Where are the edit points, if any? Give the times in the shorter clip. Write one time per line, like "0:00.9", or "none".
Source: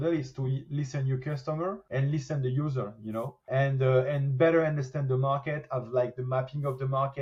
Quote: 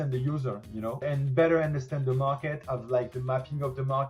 0:01.0